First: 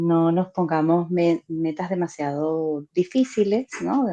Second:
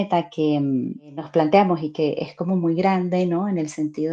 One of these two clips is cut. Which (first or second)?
second